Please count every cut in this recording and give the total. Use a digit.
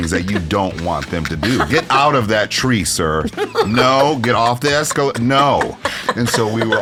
0